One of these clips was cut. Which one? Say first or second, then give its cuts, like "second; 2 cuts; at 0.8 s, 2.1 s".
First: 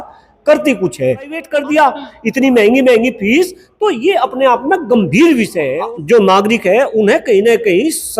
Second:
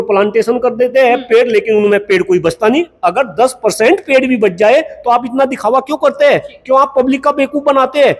first; 2 cuts; at 1.5 s, 5.7 s